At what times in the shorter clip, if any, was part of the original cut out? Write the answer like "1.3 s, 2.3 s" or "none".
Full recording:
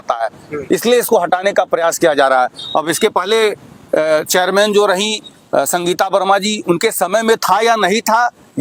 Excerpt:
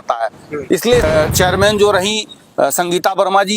1.0 s